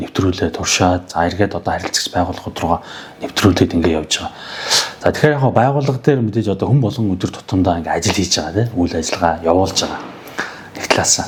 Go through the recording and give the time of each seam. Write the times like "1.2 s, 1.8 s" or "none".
none